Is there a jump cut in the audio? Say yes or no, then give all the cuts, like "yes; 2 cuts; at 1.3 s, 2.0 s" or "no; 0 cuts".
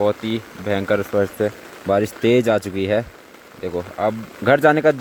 no; 0 cuts